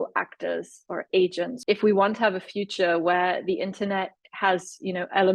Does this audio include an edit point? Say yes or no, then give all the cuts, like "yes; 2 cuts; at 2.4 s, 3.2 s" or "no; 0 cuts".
yes; 1 cut; at 1.5 s